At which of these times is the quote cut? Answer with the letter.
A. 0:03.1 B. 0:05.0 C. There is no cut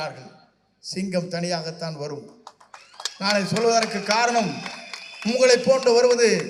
C